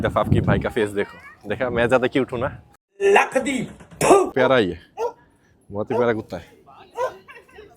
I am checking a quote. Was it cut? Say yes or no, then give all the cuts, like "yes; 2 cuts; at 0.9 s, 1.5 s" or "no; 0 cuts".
yes; 1 cut; at 4.3 s